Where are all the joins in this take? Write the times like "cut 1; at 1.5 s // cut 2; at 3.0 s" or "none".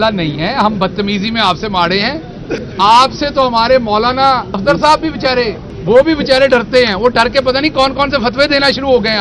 cut 1; at 2.7 s // cut 2; at 4.6 s // cut 3; at 5.7 s